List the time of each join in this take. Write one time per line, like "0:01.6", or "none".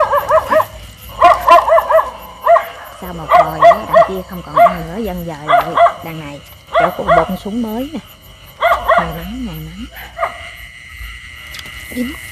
0:10.0